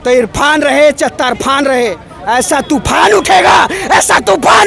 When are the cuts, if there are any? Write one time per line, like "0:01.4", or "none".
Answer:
none